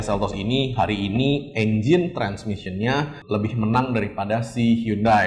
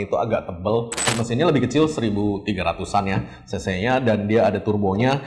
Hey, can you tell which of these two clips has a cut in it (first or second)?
second